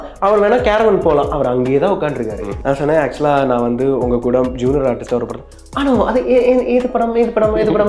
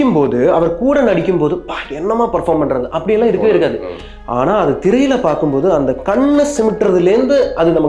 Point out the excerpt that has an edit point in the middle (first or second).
first